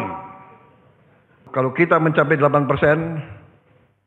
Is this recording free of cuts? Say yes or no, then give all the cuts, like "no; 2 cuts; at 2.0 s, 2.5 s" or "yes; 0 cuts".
no; 1 cut; at 1.5 s